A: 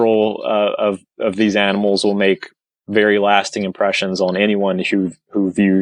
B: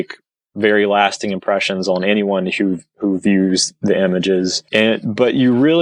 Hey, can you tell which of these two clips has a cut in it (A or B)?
B